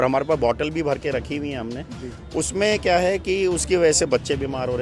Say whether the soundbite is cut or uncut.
uncut